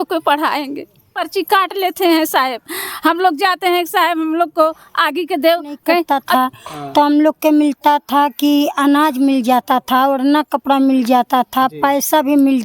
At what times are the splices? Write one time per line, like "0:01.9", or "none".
0:01.1
0:06.2